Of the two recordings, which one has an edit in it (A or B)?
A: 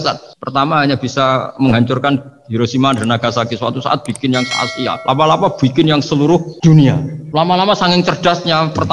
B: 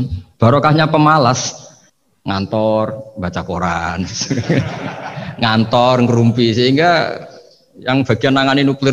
A